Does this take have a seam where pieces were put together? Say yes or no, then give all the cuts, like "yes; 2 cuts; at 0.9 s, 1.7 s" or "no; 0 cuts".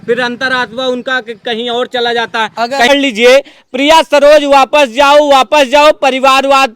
yes; 1 cut; at 2.9 s